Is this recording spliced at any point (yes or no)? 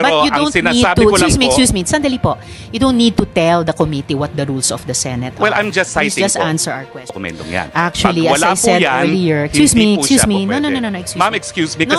no